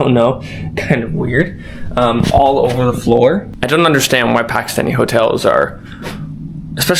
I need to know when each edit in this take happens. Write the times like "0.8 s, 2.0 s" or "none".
3.5 s

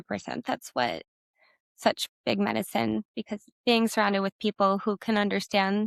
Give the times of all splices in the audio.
none

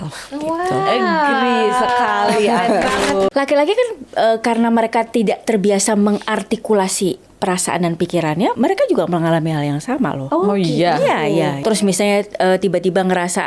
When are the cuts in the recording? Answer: 3.3 s, 8.5 s, 10.2 s, 11.6 s

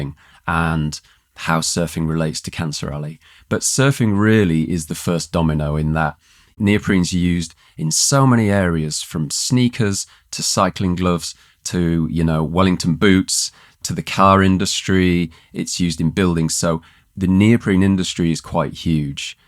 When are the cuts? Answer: none

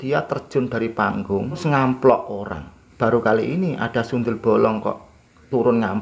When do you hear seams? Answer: 1.6 s, 2.8 s

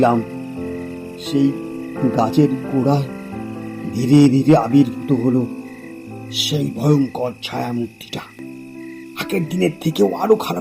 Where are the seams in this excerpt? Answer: 8.8 s

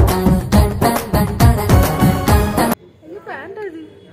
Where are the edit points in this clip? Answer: 2.8 s

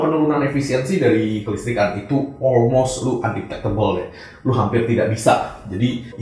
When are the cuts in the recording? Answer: none

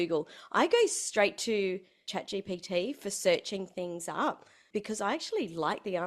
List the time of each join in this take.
2.1 s, 4.5 s

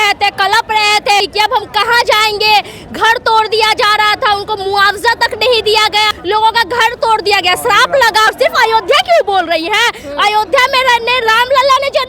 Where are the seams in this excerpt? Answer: 1.2 s, 6.2 s, 8.3 s

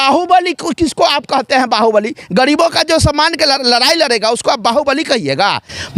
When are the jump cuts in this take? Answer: none

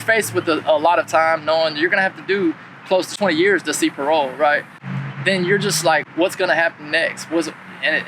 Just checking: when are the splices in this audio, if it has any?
3.1 s, 4.8 s, 6.1 s

